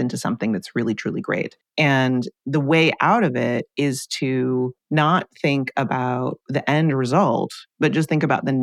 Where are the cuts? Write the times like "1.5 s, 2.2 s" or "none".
1.6 s, 4.8 s, 6.4 s, 7.6 s